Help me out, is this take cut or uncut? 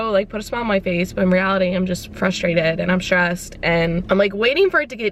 uncut